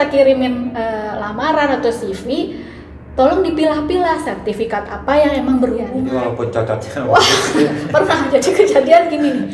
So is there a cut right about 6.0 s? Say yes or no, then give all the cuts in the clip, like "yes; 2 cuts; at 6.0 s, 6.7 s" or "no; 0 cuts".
yes; 1 cut; at 6.0 s